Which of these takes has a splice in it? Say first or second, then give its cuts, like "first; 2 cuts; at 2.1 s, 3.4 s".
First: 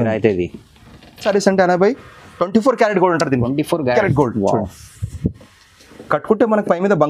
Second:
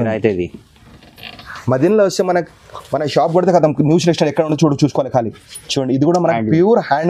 first; 1 cut; at 1.2 s